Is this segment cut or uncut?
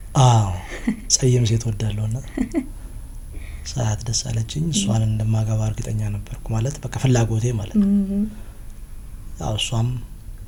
uncut